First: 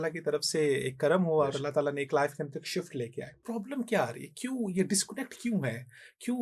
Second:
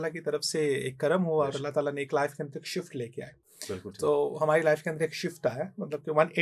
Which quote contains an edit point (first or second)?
first